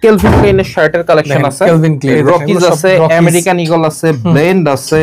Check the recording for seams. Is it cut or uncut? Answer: cut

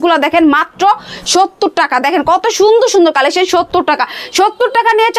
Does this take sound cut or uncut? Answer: uncut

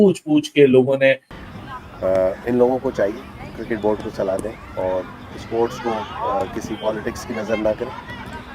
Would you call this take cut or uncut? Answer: cut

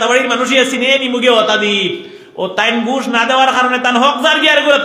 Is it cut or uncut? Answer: uncut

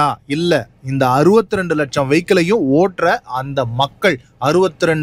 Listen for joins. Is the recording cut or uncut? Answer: uncut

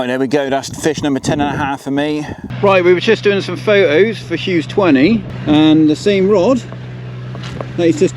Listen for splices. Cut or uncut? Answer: cut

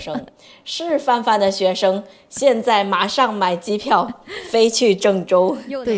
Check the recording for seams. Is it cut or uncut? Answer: uncut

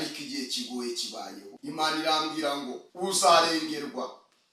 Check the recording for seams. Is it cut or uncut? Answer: cut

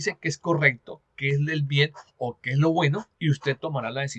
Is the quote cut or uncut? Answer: cut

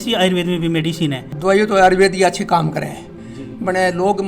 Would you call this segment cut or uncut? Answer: cut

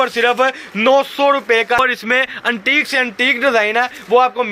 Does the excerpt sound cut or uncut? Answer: cut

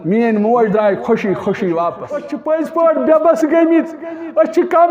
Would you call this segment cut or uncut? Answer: cut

